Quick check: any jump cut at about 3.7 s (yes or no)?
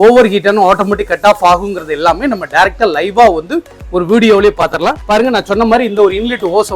no